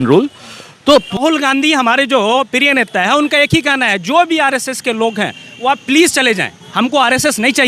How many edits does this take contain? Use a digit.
1